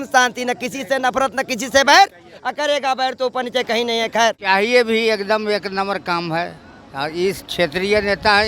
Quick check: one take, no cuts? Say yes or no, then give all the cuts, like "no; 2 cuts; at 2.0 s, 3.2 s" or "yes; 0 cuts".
no; 1 cut; at 4.4 s